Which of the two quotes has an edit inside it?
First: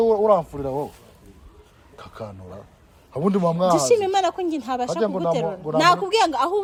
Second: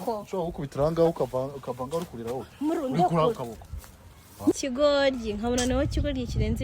second; 1 cut; at 4.6 s

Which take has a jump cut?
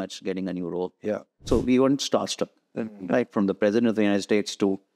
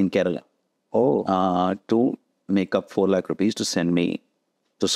first; 1 cut; at 1.4 s

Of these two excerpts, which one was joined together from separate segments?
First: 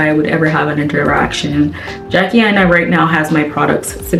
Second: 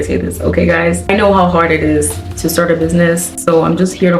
second; 2 cuts; at 1.1 s, 3.4 s

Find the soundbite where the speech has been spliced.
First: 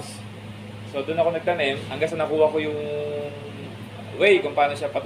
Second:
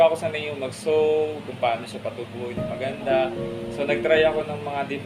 first; 1 cut; at 1.9 s

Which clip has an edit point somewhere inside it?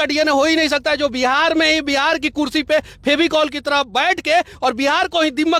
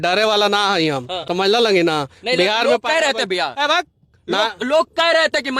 second; 1 cut; at 1.2 s

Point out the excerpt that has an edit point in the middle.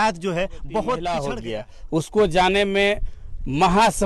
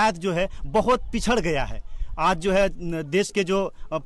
first; 1 cut; at 1.3 s

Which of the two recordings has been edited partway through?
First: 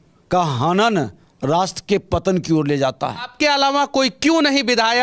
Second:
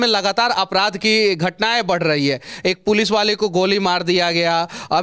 first; 1 cut; at 3.3 s

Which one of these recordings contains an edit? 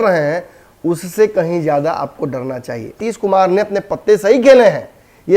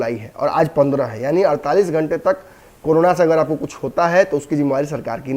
first; 1 cut; at 3.0 s

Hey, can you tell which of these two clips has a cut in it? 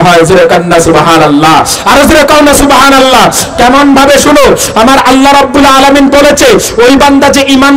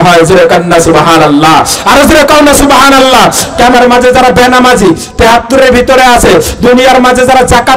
second; 1 cut; at 3.7 s

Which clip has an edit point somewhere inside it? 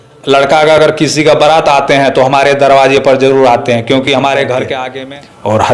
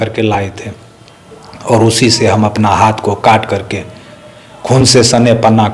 first; 1 cut; at 4.8 s

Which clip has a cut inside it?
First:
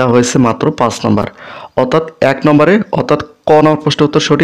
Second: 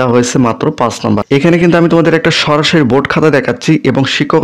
second; 1 cut; at 1.2 s

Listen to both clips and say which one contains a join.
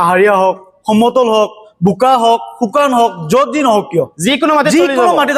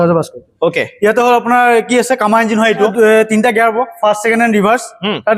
second; 1 cut; at 2.9 s

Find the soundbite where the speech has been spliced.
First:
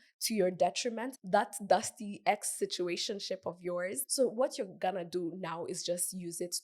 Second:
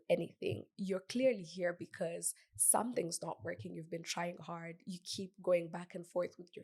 first; 1 cut; at 4.0 s

